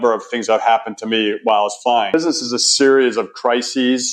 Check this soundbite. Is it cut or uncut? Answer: cut